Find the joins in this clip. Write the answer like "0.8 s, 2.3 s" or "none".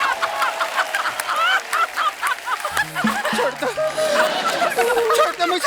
3.2 s

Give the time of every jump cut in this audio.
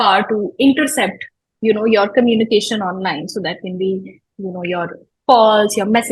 none

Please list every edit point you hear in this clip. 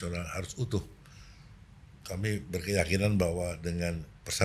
none

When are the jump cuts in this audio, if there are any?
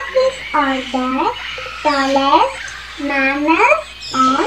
none

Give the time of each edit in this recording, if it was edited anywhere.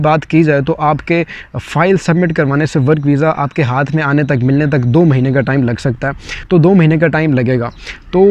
none

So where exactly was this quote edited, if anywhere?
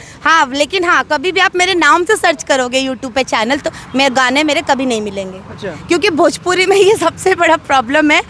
none

